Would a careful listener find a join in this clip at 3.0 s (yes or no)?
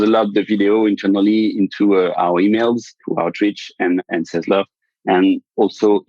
yes